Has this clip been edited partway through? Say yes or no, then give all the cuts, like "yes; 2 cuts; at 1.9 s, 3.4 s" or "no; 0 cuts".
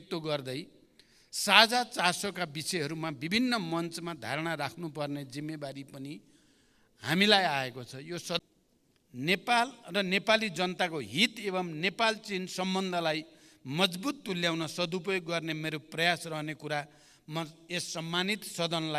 yes; 1 cut; at 8.4 s